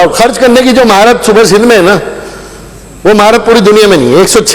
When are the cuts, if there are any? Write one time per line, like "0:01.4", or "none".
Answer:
none